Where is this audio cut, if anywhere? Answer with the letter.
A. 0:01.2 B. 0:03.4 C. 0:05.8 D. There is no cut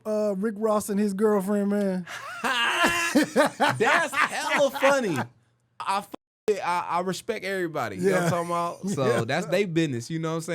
C